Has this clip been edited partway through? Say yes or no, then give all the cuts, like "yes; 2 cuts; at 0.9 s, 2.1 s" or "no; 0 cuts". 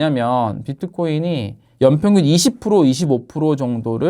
yes; 1 cut; at 1.6 s